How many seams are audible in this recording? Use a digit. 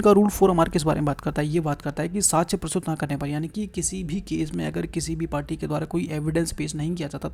0